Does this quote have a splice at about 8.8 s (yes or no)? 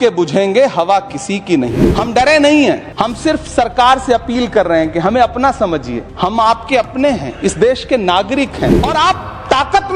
yes